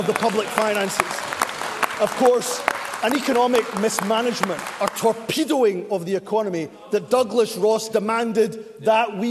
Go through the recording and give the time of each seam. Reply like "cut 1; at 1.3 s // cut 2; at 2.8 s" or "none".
none